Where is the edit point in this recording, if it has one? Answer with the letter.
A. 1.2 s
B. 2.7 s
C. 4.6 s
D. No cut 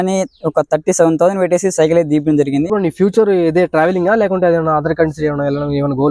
B